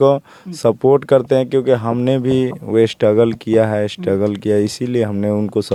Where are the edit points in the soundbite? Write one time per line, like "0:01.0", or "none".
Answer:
none